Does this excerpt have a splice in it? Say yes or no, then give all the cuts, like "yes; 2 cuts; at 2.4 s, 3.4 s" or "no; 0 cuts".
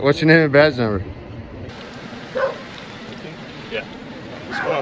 yes; 1 cut; at 1.6 s